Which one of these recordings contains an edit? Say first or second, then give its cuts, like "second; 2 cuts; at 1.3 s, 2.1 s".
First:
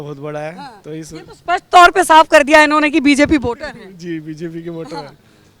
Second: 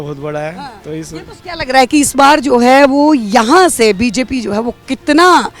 second; 1 cut; at 1.3 s